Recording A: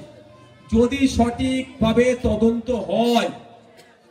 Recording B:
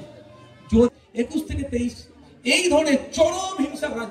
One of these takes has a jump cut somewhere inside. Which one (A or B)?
B